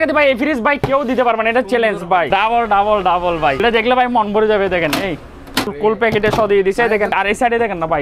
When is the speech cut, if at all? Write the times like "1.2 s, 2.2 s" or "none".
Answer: 2.3 s, 3.6 s, 5.7 s, 7.1 s